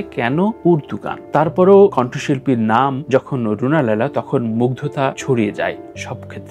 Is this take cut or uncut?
uncut